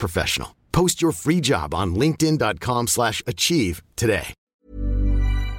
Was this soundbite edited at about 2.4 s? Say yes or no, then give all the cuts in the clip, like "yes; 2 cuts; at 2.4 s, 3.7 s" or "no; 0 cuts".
no; 1 cut; at 4.4 s